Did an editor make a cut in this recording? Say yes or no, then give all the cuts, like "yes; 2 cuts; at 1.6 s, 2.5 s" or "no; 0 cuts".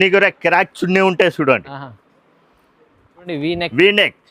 yes; 1 cut; at 3.3 s